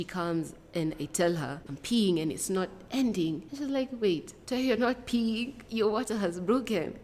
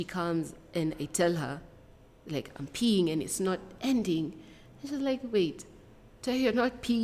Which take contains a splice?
first; 4 cuts; at 1.7 s, 3.5 s, 4.3 s, 5.6 s

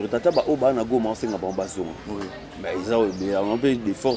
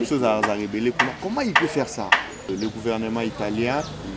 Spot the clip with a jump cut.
second; 1 cut; at 2.5 s

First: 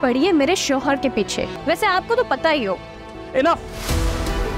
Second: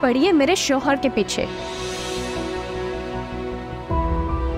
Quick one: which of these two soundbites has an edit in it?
first; 1 cut; at 1.6 s

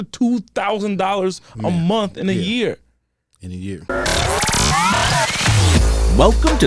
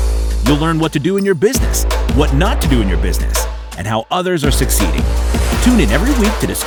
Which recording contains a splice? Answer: first; 1 cut; at 3.8 s

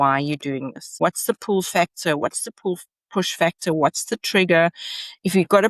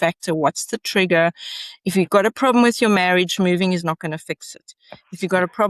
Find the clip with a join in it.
first; 1 cut; at 1.0 s

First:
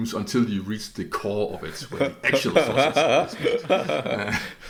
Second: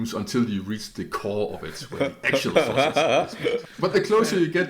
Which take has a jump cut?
second; 1 cut; at 3.6 s

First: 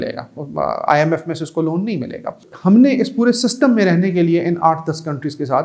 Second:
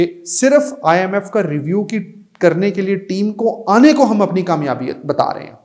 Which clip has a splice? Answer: first; 1 cut; at 2.5 s

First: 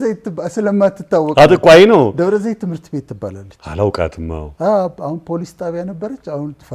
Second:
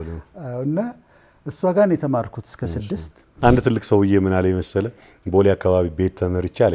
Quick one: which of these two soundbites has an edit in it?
second; 1 cut; at 3.3 s

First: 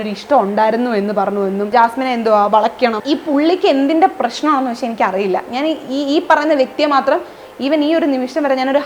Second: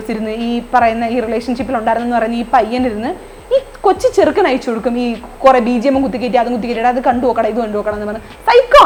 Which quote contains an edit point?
first; 2 cuts; at 1.7 s, 3.0 s

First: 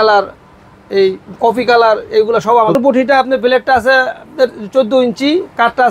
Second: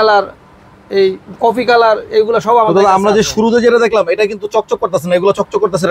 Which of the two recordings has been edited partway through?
first; 1 cut; at 2.7 s

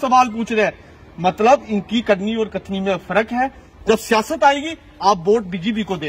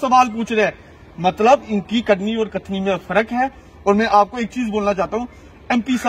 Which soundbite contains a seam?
first; 1 cut; at 3.7 s

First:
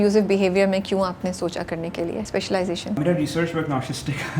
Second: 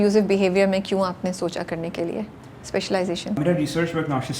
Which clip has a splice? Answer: first; 1 cut; at 2.3 s

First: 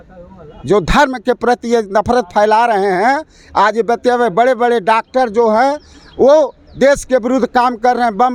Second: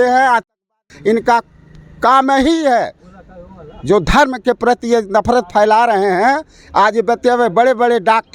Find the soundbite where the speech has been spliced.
second; 1 cut; at 0.9 s

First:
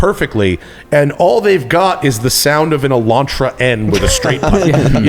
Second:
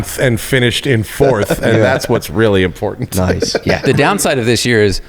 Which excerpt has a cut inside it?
second; 1 cut; at 3.9 s

